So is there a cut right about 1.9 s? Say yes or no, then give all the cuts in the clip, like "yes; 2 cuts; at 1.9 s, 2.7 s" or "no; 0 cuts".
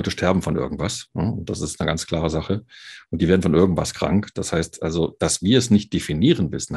no; 0 cuts